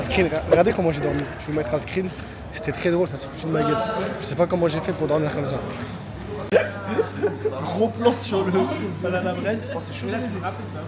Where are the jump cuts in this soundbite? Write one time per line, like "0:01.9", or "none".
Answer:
0:06.4